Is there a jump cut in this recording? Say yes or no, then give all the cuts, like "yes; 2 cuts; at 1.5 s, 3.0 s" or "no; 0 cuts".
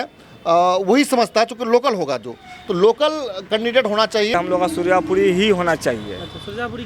yes; 1 cut; at 4.3 s